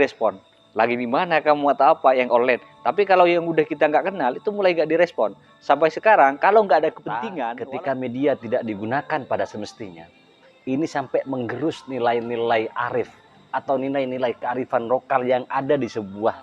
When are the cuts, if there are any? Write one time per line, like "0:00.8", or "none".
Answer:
0:07.3